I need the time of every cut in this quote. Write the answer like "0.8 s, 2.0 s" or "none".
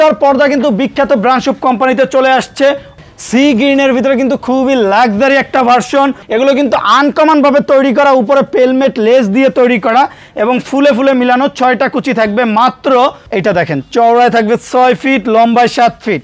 2.9 s, 6.2 s, 13.3 s